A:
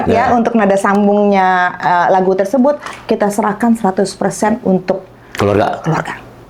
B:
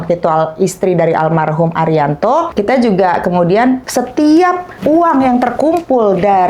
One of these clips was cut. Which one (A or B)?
B